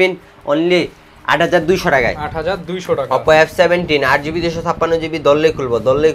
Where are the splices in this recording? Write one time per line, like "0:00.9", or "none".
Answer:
none

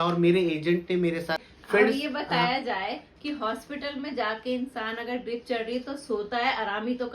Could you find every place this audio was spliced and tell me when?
0:01.4

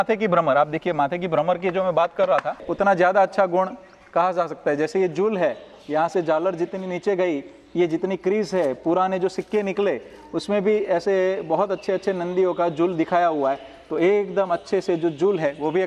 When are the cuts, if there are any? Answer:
0:02.7

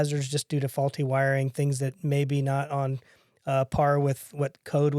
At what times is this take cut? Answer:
none

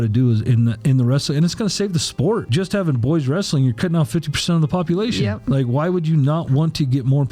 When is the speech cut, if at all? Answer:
0:02.5

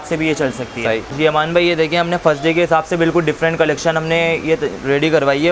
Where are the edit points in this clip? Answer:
0:01.1

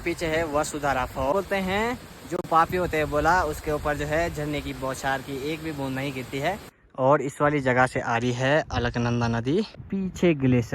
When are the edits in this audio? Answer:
0:01.3
0:06.8
0:09.8

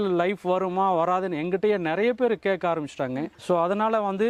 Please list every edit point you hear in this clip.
none

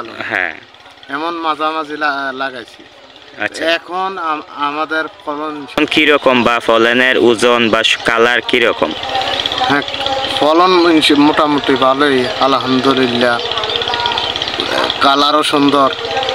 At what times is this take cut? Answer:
0:05.7

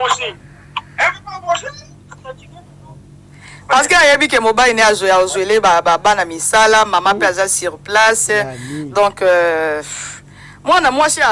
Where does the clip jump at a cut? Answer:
none

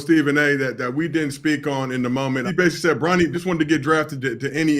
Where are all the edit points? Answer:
0:02.5
0:03.3

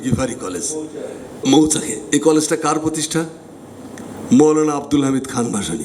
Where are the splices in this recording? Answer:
0:01.4

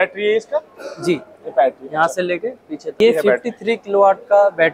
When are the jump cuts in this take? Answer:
0:03.0

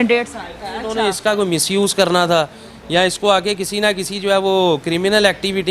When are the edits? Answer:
0:00.9

